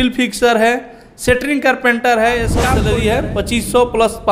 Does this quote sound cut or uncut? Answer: cut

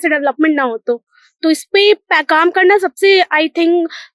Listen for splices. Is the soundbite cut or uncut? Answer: uncut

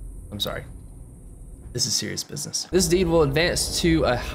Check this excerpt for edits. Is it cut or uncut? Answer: cut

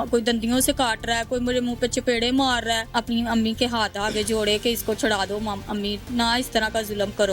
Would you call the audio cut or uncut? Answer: cut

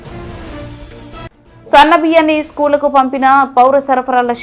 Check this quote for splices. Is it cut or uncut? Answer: uncut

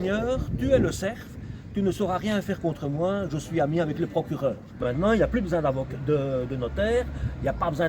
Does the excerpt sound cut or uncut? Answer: cut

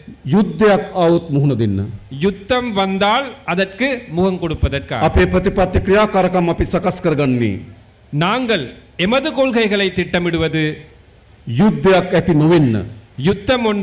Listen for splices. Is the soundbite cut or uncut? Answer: uncut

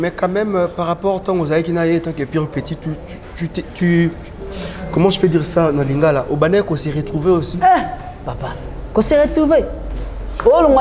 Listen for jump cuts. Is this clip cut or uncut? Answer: uncut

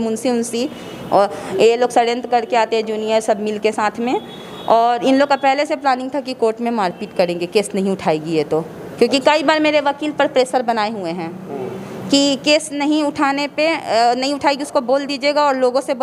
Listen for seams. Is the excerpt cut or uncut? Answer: uncut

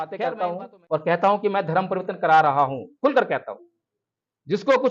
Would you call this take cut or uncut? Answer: uncut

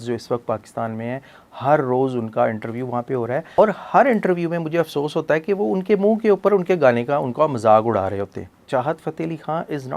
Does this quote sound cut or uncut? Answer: cut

